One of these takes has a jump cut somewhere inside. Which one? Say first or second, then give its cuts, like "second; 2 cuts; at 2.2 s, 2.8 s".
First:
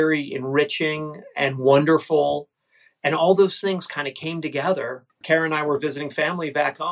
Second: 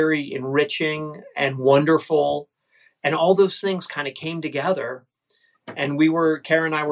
first; 1 cut; at 5.2 s